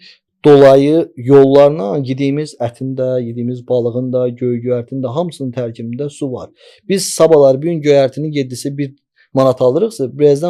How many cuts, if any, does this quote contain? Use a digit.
0